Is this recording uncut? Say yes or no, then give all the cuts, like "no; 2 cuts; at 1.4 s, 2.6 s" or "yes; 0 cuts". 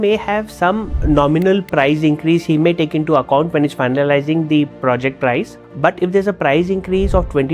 no; 2 cuts; at 1.0 s, 5.6 s